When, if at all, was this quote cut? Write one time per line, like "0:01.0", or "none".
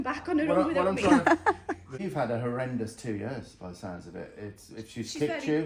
0:02.0